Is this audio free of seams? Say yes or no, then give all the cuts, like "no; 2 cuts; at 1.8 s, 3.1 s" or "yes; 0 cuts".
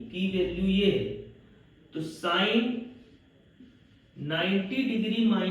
yes; 0 cuts